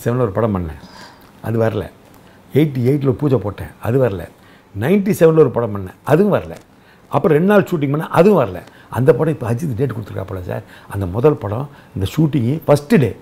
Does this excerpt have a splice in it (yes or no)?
no